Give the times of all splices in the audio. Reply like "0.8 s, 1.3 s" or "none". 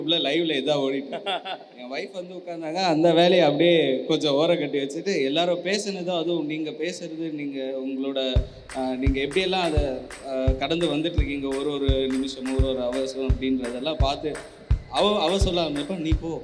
none